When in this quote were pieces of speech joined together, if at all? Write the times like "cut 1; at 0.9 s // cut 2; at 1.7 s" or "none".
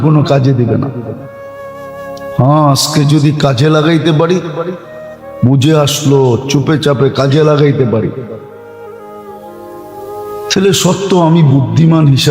cut 1; at 8.4 s // cut 2; at 9.9 s